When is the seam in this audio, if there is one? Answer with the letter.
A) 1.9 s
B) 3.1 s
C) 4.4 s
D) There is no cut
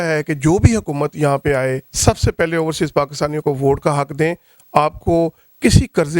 A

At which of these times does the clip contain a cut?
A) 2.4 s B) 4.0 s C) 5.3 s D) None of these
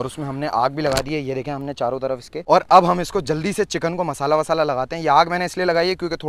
D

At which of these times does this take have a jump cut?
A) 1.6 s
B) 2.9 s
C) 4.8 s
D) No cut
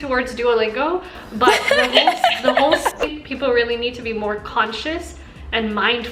B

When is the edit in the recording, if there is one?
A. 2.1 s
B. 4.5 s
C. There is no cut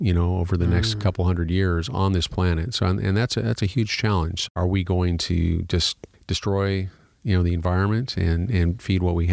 B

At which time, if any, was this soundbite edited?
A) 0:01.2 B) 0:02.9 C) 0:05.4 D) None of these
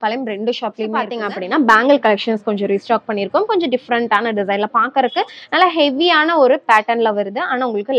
A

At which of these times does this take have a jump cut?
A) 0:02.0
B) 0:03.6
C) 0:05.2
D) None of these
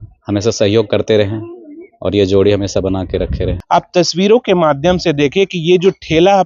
B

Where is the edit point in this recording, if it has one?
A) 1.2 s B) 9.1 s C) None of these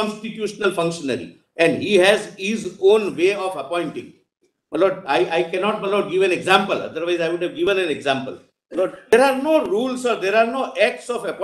B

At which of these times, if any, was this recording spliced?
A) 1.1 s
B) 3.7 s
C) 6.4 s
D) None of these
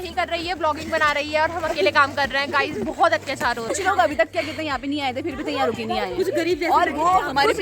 B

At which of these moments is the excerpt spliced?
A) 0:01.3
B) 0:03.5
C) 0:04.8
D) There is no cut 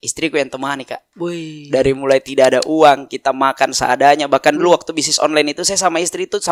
D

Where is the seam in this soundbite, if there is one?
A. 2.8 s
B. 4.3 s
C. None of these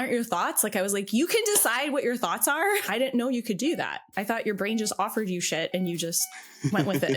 A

